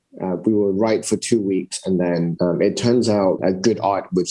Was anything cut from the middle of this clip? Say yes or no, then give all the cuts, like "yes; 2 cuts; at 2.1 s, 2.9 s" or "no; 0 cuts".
yes; 1 cut; at 3.4 s